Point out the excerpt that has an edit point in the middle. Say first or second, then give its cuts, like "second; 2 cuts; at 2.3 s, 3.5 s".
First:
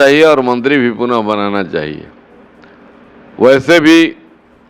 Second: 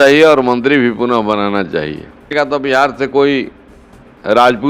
second; 1 cut; at 2.3 s